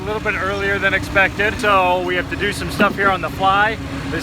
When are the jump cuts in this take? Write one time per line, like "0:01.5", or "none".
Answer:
0:01.6